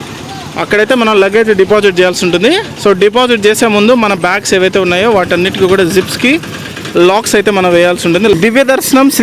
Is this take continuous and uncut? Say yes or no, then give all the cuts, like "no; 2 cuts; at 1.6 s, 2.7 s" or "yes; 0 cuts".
no; 1 cut; at 8.3 s